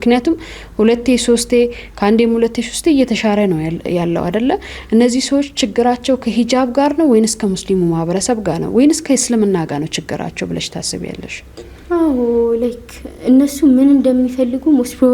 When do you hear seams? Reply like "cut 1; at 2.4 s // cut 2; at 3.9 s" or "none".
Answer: none